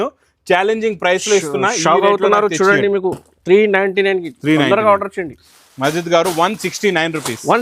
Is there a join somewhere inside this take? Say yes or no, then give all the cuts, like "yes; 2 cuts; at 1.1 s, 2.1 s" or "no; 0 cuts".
yes; 1 cut; at 5.6 s